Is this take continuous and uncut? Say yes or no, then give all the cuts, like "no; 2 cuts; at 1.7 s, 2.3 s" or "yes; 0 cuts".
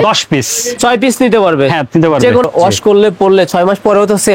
no; 1 cut; at 2.4 s